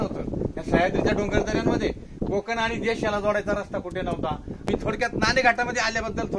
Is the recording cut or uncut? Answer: cut